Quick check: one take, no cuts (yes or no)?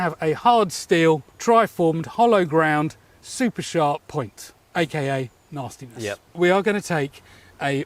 no